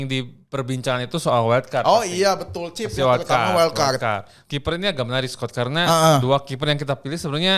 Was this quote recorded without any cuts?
no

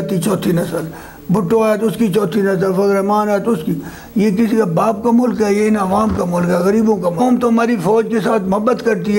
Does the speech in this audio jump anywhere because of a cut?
yes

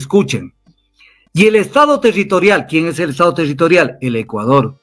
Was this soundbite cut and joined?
no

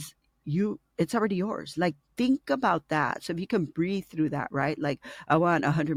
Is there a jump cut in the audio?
no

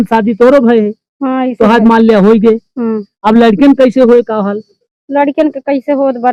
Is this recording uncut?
yes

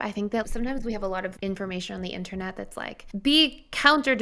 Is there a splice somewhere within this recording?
yes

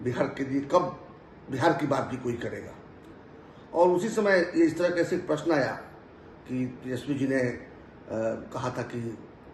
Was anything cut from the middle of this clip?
no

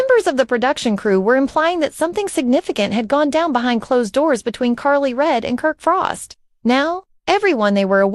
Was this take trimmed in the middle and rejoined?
no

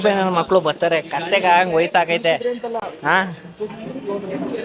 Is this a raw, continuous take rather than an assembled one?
yes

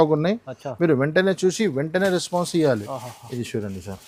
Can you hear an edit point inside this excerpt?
no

